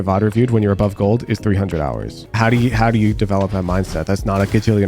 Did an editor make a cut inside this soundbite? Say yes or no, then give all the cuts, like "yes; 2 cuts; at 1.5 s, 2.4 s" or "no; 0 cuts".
yes; 1 cut; at 2.2 s